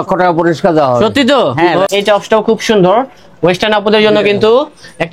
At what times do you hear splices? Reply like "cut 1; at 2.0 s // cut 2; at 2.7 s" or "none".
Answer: cut 1; at 1.9 s

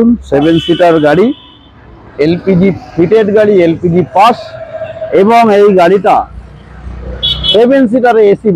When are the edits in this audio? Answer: none

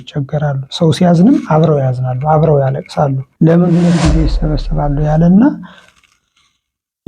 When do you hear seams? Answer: cut 1; at 3.2 s

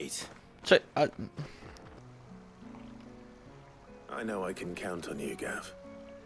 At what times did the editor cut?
cut 1; at 2.0 s

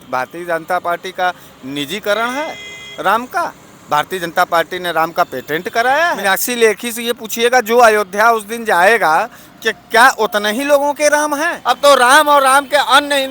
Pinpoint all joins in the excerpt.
cut 1; at 6.2 s // cut 2; at 11.5 s

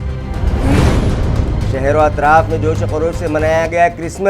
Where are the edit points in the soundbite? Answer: cut 1; at 1.7 s

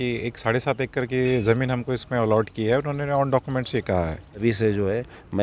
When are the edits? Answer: cut 1; at 4.4 s

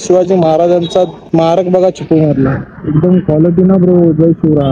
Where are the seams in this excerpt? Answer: cut 1; at 1.2 s

